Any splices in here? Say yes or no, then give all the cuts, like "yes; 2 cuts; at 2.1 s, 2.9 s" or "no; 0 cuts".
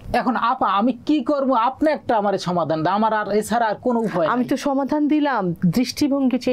no; 0 cuts